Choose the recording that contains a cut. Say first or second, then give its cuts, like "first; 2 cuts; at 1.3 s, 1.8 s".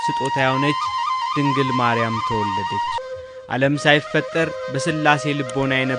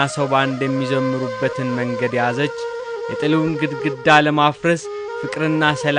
first; 1 cut; at 3.0 s